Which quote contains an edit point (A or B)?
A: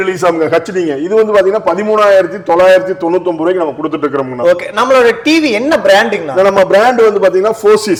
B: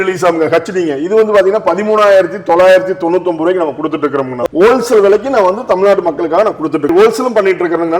B